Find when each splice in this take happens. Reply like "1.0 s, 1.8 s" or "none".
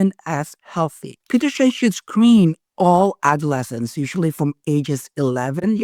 1.1 s